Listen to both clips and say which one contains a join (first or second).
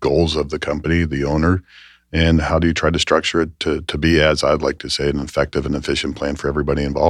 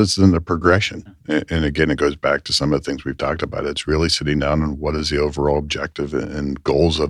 second